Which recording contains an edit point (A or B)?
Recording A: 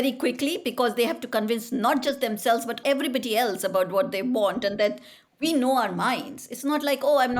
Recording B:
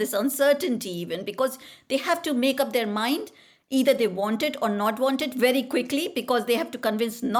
A